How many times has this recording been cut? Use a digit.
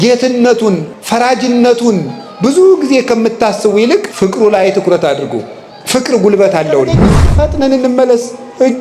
3